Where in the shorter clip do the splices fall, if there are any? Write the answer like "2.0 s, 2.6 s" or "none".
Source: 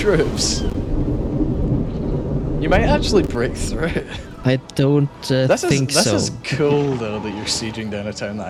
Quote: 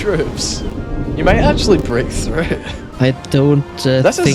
1.2 s

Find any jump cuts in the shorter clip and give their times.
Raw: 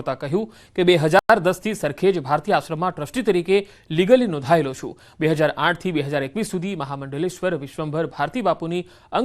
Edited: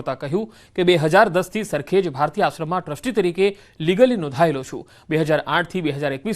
1.2 s

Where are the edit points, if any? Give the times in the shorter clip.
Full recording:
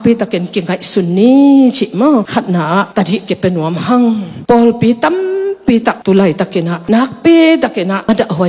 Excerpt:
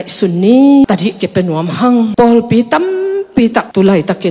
0.8 s, 2.1 s

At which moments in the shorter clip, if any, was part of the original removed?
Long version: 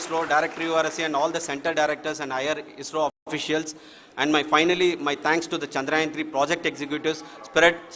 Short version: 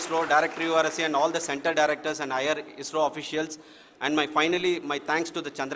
3.2 s

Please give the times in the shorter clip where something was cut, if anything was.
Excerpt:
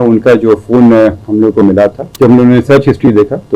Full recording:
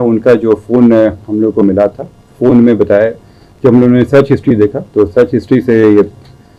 2.0 s

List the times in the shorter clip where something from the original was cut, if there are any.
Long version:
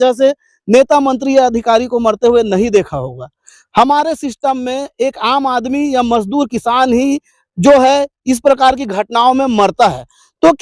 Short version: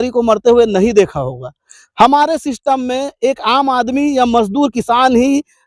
none

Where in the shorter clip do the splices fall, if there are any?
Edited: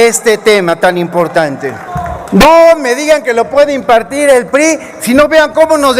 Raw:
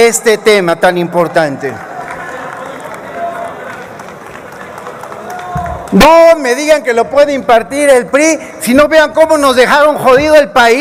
1.9 s

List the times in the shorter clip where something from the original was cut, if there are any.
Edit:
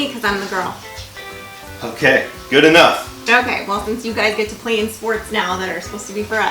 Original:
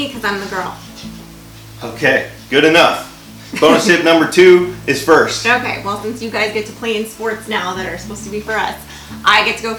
3.2 s

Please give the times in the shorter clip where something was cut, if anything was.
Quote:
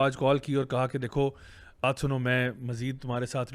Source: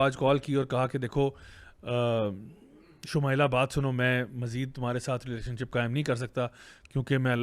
1.8 s

